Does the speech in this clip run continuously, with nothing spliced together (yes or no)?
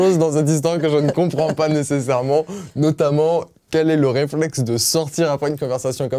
yes